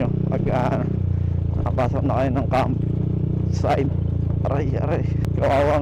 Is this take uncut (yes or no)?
yes